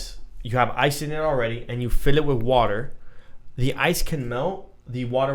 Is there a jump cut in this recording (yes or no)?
no